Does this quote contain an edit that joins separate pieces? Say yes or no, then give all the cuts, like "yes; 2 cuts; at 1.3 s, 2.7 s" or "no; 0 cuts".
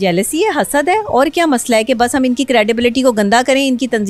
no; 0 cuts